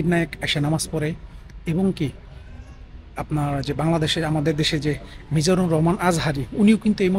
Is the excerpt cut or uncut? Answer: uncut